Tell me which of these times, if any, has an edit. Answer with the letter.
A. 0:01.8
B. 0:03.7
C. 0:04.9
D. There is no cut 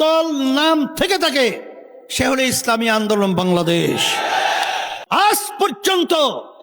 C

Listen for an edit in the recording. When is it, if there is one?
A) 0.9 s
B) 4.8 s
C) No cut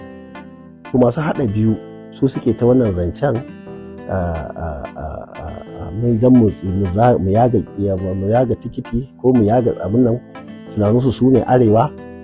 A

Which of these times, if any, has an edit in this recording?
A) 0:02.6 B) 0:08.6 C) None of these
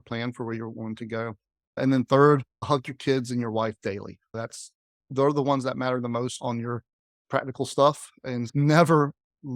C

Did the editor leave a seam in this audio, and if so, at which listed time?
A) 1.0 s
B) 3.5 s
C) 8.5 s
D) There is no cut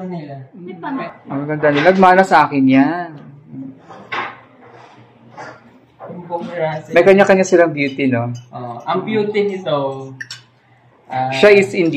A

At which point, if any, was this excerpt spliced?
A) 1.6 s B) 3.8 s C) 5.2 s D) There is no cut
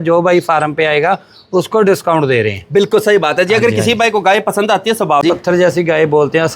C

